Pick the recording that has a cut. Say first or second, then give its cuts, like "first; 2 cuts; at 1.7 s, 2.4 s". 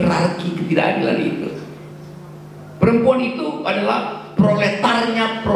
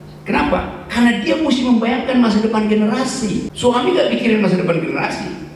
second; 1 cut; at 3.5 s